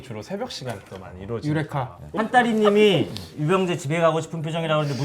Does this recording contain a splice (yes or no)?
yes